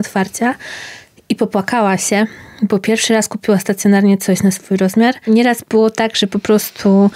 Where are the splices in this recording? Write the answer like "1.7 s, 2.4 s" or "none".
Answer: 5.2 s